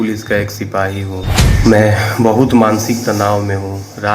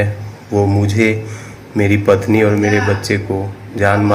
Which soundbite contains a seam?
first; 1 cut; at 1.4 s

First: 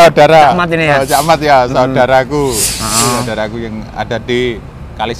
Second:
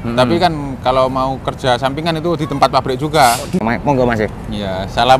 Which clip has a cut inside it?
second; 1 cut; at 3.6 s

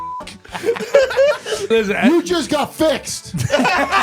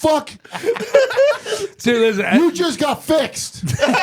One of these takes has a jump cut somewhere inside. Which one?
first; 1 cut; at 1.7 s

